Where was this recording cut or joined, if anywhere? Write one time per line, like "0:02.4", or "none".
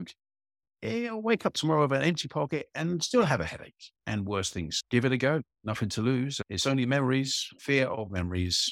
0:04.8
0:06.4
0:07.5